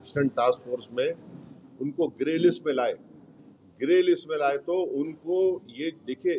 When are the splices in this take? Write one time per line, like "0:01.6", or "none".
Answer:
none

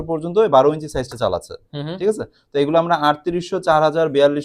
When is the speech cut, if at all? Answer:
none

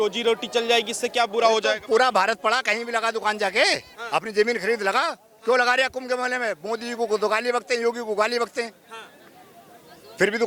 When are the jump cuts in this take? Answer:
none

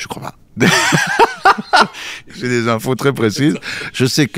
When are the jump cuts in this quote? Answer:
0:02.4

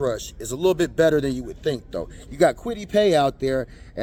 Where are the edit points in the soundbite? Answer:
none

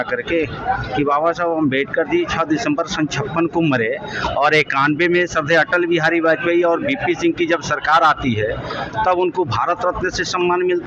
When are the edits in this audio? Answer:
none

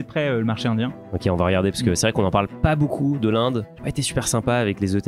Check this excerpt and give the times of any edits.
0:01.0

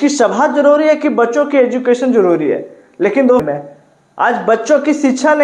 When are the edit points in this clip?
0:03.4

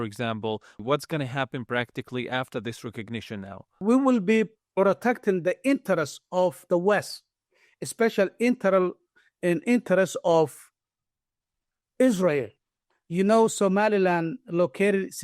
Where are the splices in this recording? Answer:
0:00.8
0:03.8

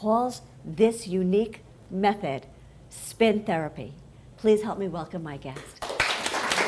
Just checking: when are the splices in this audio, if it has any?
0:04.9

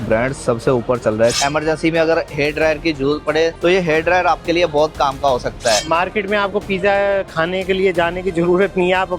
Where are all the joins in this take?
0:01.4
0:05.8

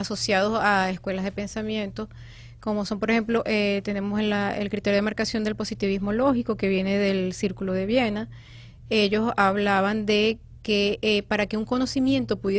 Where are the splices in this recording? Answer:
0:07.6

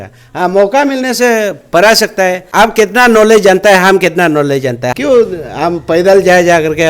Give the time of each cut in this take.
0:02.4
0:04.9

